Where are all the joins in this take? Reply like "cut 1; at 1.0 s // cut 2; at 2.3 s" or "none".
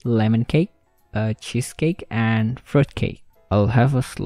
cut 1; at 3.3 s